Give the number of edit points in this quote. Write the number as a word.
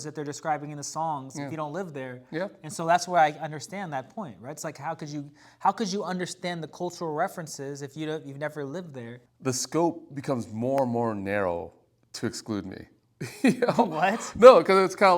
one